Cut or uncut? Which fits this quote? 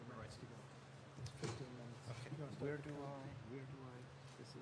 uncut